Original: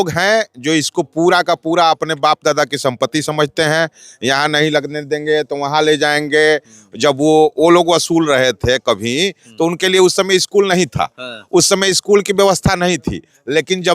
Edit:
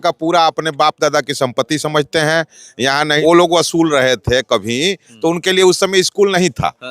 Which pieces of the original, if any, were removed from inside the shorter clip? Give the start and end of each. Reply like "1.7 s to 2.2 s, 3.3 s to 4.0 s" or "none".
4.6 s to 7.5 s